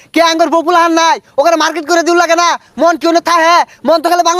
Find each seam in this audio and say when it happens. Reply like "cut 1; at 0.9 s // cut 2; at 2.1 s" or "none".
none